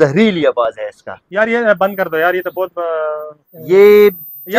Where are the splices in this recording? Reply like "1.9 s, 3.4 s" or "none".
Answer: 1.2 s